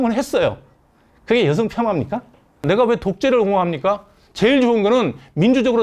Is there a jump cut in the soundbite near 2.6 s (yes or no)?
yes